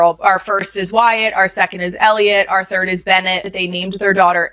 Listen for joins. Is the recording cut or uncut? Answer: uncut